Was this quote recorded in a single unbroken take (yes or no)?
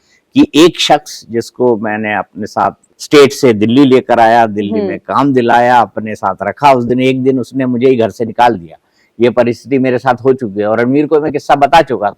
no